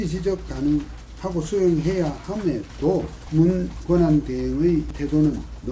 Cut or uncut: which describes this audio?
cut